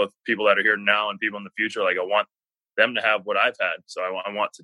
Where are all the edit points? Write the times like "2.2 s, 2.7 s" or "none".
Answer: none